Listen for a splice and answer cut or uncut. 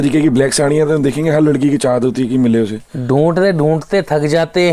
uncut